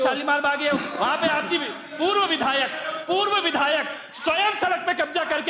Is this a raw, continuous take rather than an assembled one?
yes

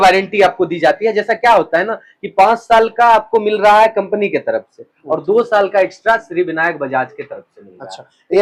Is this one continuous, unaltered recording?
yes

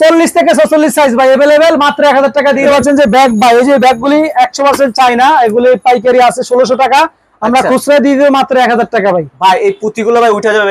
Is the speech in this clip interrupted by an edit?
yes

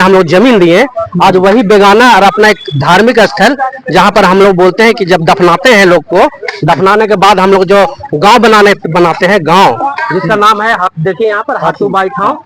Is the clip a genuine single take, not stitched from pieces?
yes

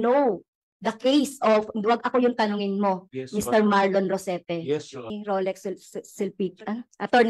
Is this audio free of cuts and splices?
no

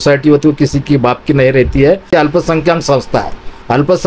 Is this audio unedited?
no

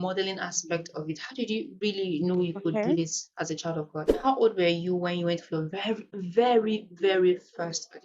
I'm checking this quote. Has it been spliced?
yes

